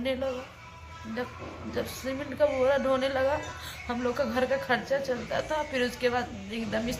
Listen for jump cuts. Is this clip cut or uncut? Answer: uncut